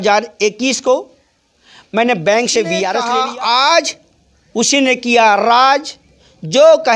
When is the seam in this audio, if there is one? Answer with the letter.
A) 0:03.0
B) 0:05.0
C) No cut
A